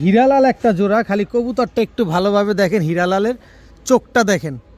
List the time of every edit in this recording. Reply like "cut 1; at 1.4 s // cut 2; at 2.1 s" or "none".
none